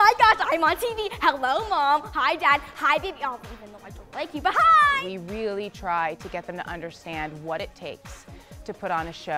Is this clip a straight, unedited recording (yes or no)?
no